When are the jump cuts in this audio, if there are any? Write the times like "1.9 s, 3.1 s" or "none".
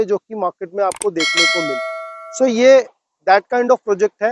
none